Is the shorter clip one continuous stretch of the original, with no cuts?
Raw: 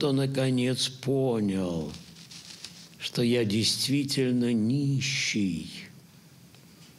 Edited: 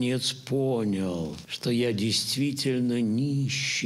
no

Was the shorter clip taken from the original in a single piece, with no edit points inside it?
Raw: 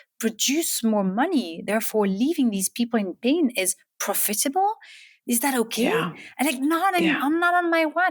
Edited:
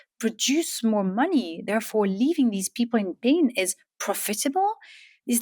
yes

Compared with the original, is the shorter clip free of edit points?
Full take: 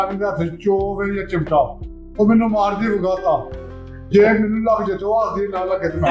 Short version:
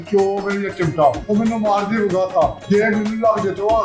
no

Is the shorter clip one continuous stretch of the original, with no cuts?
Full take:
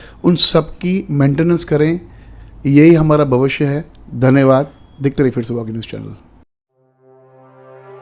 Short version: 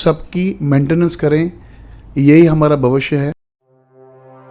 no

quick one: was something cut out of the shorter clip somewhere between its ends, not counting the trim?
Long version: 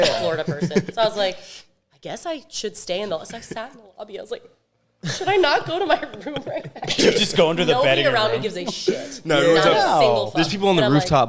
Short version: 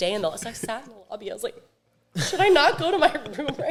no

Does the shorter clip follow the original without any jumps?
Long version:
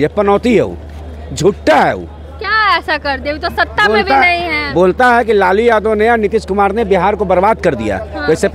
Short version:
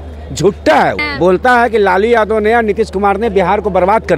no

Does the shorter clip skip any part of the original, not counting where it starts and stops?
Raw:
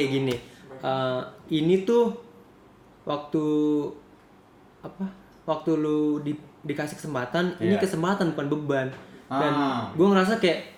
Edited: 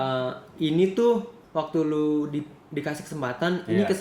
yes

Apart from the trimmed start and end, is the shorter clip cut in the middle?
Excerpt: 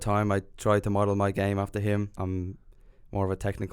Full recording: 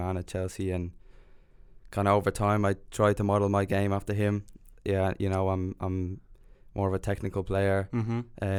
yes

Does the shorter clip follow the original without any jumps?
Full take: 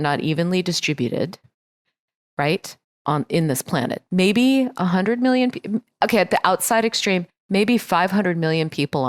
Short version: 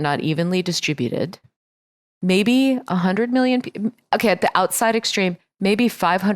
no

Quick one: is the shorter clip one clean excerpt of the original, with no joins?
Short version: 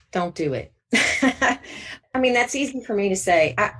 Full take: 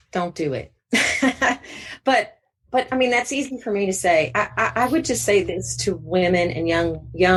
no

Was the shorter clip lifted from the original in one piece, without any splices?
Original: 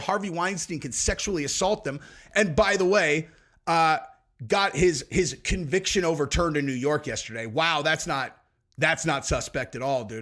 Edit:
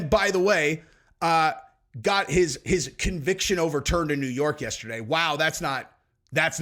yes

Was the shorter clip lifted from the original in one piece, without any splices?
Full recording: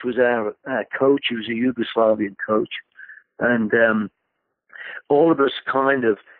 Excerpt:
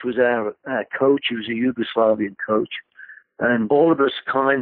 no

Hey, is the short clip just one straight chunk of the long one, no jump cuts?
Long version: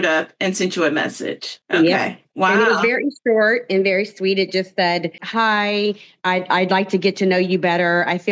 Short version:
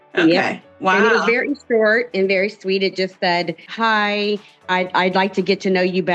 yes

